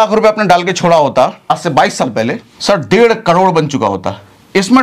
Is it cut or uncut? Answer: cut